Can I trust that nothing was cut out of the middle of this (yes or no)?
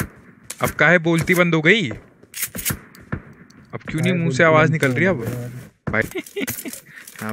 no